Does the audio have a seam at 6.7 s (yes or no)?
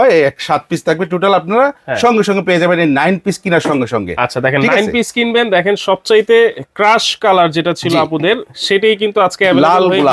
no